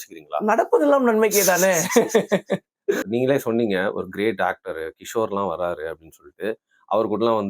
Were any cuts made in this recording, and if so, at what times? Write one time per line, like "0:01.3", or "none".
0:03.0